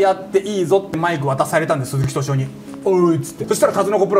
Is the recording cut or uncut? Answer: uncut